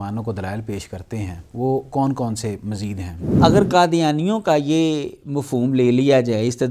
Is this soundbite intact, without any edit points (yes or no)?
no